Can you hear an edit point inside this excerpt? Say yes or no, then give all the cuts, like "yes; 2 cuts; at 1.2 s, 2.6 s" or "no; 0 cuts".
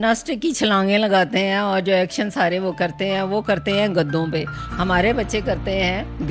no; 0 cuts